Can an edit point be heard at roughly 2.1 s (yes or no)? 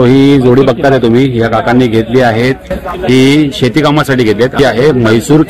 no